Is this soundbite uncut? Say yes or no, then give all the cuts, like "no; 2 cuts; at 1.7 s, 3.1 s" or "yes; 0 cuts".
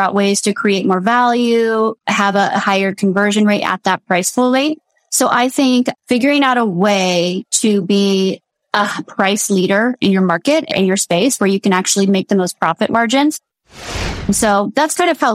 no; 1 cut; at 13.7 s